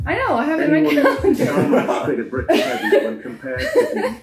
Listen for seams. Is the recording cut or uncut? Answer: uncut